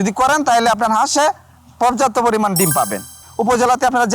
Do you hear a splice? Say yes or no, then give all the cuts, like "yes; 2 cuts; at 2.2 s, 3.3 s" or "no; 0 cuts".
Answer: yes; 1 cut; at 3.2 s